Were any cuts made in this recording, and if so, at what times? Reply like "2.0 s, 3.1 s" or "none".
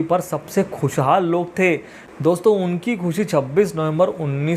2.1 s

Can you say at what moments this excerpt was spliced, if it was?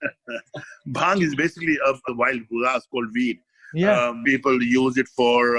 2.0 s, 4.2 s

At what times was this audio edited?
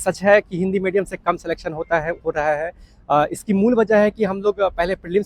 none

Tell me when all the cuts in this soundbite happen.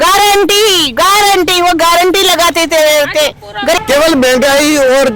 3.8 s

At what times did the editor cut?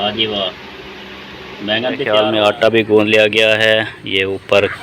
2.0 s

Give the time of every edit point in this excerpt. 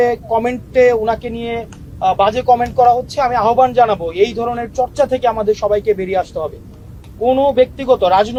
none

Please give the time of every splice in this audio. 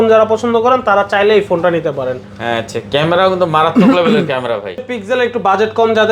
4.9 s

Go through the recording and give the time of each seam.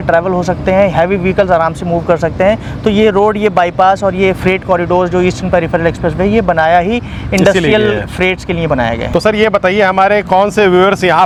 none

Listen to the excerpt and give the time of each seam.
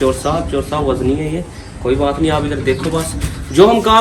none

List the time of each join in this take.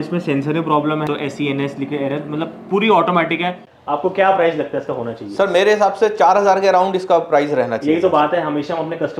1.1 s, 3.7 s

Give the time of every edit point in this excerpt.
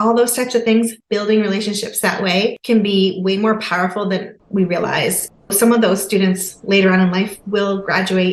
1.0 s, 2.6 s, 4.4 s

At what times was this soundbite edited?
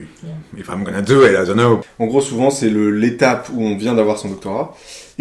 1.8 s

